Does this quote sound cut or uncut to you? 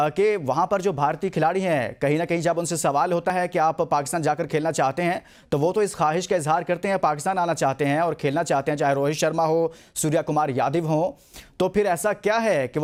uncut